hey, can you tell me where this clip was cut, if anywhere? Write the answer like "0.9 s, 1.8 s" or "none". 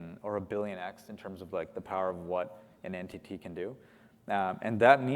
none